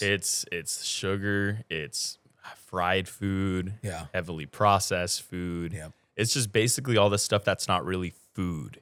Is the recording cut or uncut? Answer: uncut